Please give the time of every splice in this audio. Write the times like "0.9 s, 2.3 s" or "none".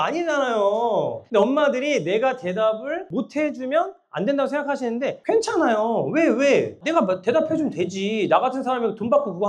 none